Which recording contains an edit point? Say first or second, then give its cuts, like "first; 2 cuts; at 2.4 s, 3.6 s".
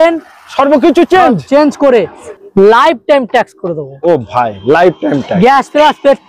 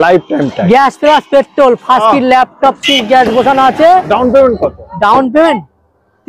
first; 1 cut; at 2.2 s